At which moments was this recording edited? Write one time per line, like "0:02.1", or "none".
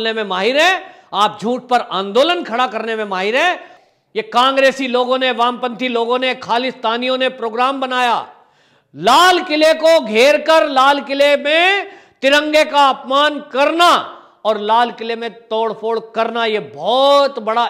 0:03.7